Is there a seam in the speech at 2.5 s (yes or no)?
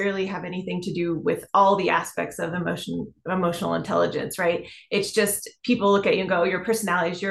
no